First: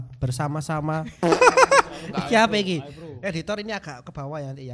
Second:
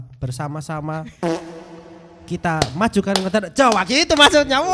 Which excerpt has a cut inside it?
first; 1 cut; at 1.3 s

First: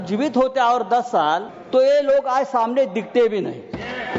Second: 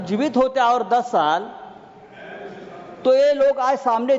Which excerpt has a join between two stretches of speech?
first; 1 cut; at 1.5 s

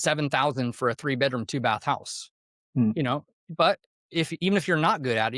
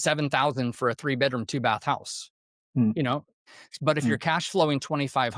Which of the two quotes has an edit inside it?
second; 1 cut; at 3.4 s

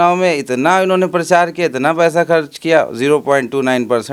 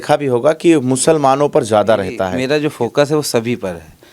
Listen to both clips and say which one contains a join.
second; 1 cut; at 2.3 s

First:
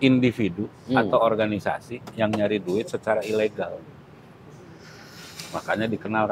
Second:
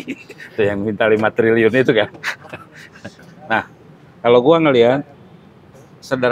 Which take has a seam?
second; 1 cut; at 3.2 s

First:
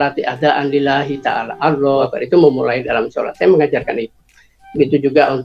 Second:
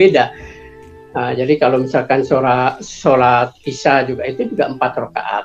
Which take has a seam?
first; 1 cut; at 2.0 s

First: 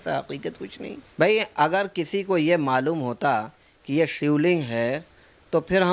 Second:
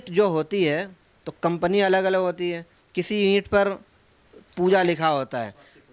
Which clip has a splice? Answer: first; 1 cut; at 1.0 s

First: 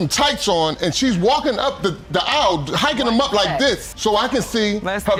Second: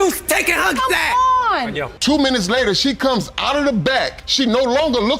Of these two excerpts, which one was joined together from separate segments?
second; 1 cut; at 1.9 s

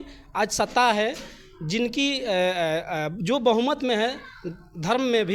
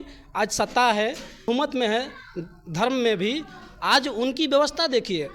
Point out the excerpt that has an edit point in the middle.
second; 1 cut; at 1.5 s

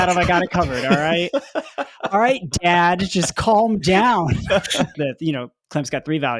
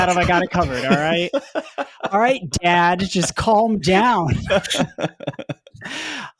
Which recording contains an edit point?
first; 1 cut; at 4.9 s

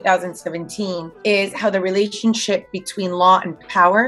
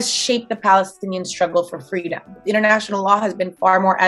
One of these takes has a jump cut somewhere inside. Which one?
second; 1 cut; at 2.4 s

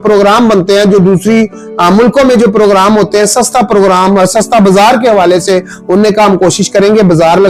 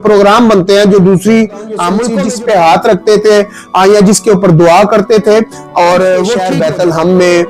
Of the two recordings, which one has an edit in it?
second; 2 cuts; at 2.1 s, 6.5 s

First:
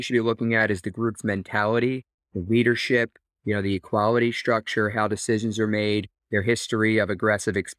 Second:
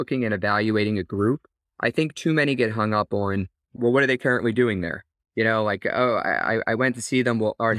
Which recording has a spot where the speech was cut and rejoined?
second; 1 cut; at 3.7 s

